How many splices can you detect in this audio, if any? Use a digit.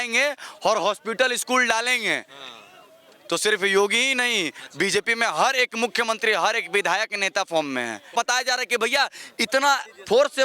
1